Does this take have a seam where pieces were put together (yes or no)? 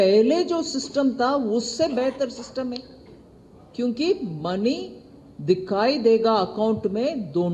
no